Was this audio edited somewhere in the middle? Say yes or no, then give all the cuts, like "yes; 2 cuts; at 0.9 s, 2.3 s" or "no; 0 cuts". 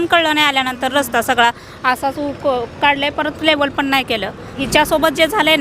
yes; 1 cut; at 4.6 s